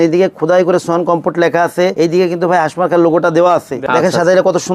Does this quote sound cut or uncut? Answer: cut